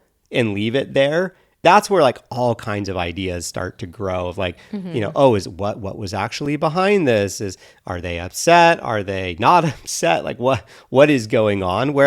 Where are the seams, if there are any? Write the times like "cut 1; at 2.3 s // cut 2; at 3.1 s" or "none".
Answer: cut 1; at 1.6 s